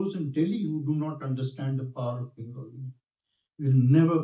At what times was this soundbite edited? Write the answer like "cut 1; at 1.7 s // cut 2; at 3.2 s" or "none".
none